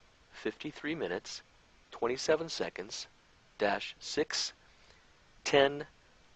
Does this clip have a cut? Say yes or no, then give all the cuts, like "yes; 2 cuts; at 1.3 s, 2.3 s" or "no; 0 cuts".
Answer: no; 0 cuts